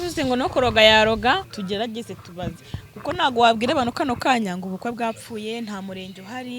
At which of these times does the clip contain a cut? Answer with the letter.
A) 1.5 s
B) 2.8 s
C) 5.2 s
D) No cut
A